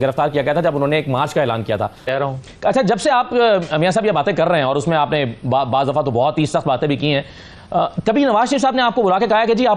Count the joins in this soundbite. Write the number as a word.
one